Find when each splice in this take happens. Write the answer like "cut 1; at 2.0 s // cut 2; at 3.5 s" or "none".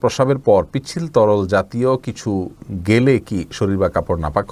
none